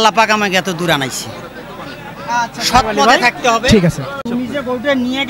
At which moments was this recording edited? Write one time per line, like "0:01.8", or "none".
0:04.2